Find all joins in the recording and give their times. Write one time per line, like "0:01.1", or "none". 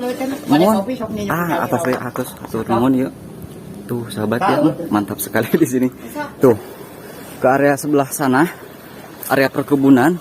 0:06.3